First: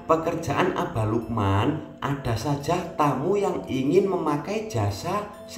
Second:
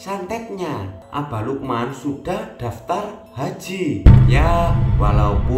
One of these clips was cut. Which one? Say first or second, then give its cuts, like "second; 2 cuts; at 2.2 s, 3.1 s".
second; 1 cut; at 1.0 s